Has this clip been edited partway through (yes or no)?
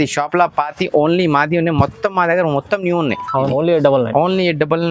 no